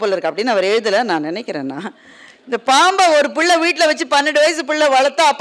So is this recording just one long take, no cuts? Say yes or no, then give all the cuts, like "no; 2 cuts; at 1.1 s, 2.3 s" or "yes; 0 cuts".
yes; 0 cuts